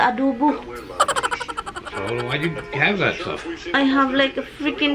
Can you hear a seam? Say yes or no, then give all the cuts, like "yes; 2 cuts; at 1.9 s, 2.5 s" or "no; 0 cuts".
no; 0 cuts